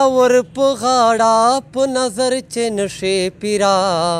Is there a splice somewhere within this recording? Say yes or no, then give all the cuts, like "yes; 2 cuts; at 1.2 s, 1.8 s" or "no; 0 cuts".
no; 0 cuts